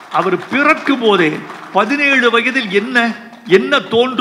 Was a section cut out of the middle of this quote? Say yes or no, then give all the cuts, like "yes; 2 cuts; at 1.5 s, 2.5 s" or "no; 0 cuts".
no; 0 cuts